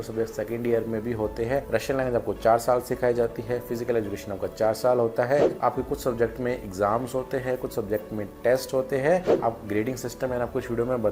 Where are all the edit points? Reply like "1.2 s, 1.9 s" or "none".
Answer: 1.7 s, 5.5 s, 9.3 s